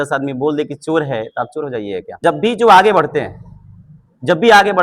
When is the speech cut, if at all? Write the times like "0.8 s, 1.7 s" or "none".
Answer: 2.2 s